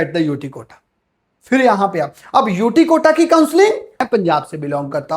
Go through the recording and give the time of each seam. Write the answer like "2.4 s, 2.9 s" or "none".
4.1 s